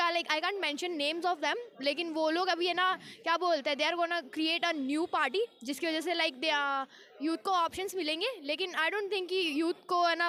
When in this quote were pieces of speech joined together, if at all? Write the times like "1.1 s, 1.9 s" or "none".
none